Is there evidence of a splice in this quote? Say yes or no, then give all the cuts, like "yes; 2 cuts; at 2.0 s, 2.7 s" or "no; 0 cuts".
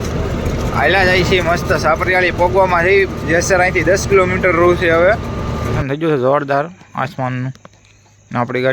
yes; 1 cut; at 5.7 s